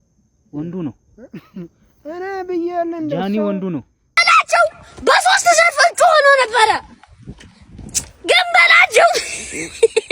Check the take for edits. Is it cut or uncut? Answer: cut